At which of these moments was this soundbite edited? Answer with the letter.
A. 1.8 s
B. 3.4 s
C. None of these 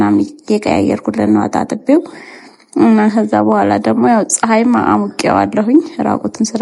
C